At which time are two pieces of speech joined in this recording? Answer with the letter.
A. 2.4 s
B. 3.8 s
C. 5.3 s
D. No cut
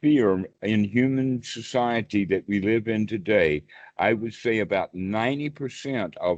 D